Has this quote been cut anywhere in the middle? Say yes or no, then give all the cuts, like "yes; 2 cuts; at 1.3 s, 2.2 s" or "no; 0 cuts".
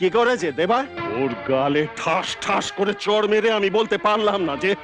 yes; 1 cut; at 1.0 s